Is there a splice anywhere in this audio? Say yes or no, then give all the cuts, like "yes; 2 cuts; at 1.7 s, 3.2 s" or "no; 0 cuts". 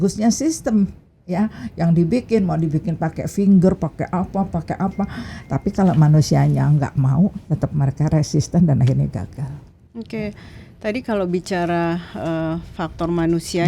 no; 0 cuts